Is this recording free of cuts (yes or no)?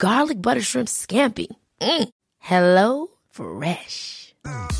yes